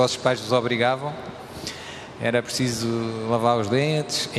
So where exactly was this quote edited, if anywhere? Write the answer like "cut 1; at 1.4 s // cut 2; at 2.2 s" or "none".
cut 1; at 2.5 s